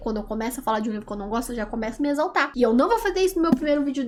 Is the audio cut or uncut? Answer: uncut